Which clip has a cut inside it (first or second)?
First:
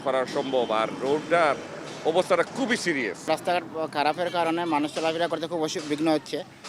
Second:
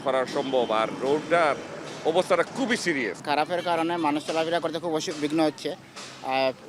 second